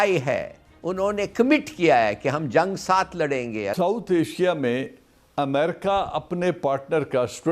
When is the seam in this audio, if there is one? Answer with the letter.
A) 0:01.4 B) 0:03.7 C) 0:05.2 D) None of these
B